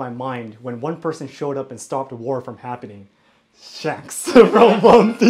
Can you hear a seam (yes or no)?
no